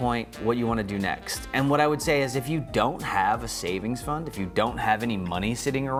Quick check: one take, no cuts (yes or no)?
yes